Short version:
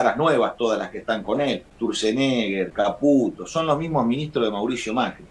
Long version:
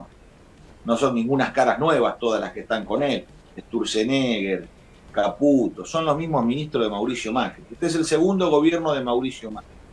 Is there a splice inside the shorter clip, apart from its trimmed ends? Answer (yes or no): yes